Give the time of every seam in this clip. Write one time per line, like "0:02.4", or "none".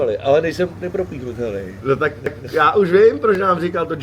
none

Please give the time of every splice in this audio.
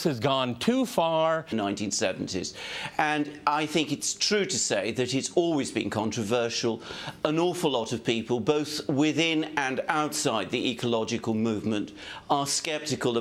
none

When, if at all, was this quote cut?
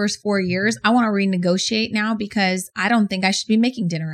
none

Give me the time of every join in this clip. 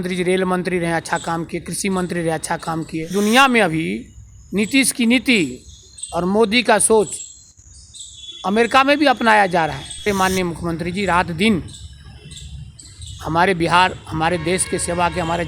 0:03.1
0:10.1

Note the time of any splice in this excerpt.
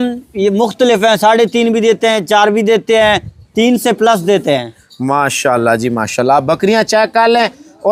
none

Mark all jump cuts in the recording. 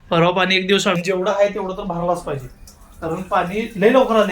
0:00.9

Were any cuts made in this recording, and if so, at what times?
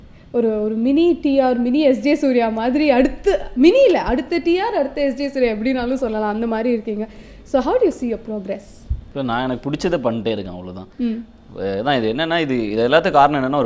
0:11.6

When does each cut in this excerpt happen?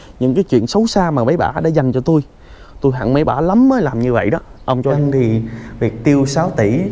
0:04.9

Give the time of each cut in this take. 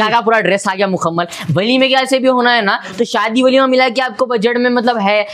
none

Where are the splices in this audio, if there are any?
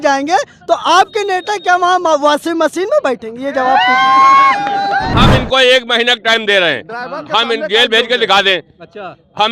0:05.1

